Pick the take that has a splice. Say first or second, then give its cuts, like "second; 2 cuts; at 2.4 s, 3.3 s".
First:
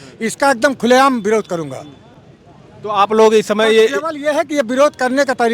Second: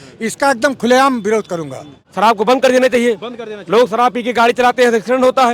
second; 1 cut; at 2.0 s